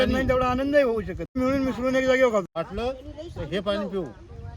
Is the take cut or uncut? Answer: cut